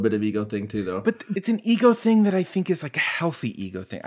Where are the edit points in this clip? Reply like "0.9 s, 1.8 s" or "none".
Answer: 1.2 s